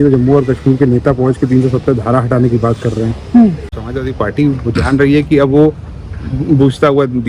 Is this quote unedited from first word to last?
no; 1 cut; at 3.8 s

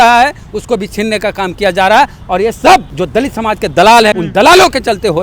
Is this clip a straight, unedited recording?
no; 2 cuts; at 3.0 s, 4.1 s

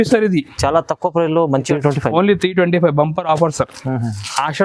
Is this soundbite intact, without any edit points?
no; 1 cut; at 1.7 s

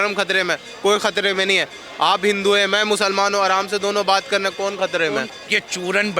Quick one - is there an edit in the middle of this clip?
yes; 1 cut; at 5.3 s

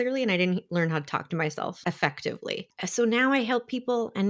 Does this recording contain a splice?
yes; 2 cuts; at 1.8 s, 2.7 s

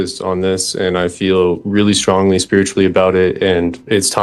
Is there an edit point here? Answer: no; 0 cuts

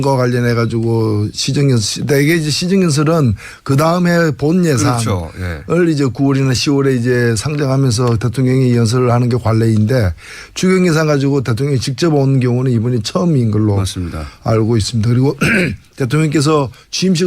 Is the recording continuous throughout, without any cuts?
no; 1 cut; at 8.3 s

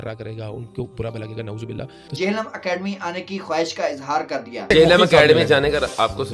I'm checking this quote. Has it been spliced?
yes; 2 cuts; at 2.1 s, 4.7 s

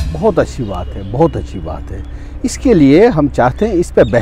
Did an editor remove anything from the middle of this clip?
no; 0 cuts

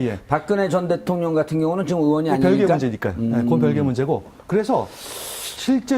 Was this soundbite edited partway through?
no; 0 cuts

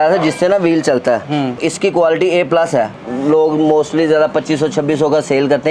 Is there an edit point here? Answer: yes; 2 cuts; at 1.6 s, 3.0 s

